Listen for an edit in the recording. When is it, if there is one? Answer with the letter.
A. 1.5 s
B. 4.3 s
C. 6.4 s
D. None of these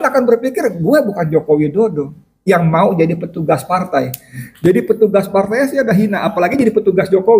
D